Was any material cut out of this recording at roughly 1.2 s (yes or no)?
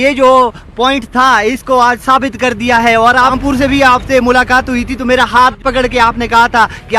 no